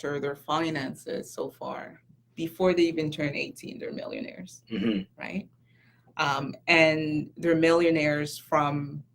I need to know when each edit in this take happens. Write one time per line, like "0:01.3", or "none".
none